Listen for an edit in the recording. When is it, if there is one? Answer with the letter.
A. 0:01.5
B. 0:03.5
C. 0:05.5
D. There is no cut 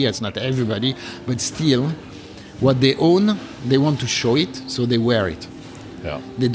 D